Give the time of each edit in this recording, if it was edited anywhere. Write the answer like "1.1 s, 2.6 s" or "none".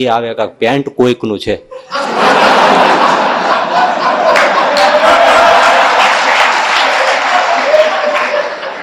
none